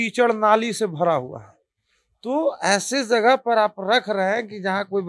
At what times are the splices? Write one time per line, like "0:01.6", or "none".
none